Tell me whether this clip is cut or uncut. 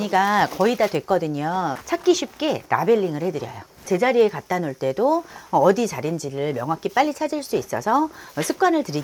uncut